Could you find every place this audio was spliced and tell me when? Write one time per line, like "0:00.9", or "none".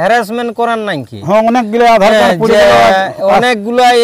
none